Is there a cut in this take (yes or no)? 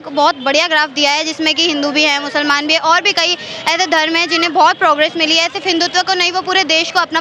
no